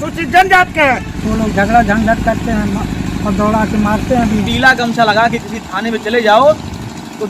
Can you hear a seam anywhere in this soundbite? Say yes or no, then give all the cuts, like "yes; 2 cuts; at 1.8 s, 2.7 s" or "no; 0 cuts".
yes; 2 cuts; at 1.1 s, 4.4 s